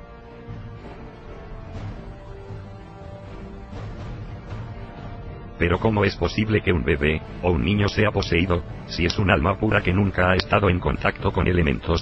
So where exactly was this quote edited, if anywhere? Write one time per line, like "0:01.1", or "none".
none